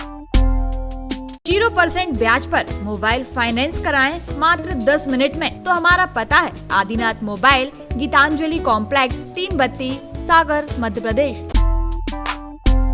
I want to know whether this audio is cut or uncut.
cut